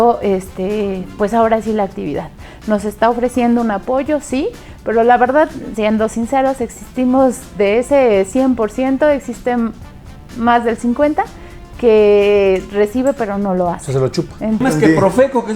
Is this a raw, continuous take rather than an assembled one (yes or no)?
no